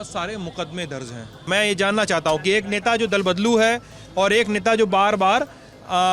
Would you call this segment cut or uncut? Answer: cut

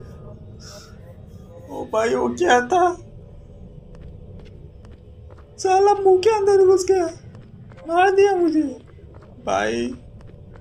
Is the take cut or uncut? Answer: uncut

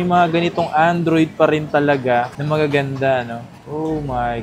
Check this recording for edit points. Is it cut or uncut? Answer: uncut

